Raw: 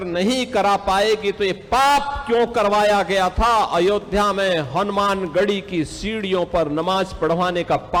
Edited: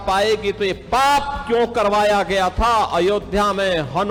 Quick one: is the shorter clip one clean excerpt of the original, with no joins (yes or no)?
yes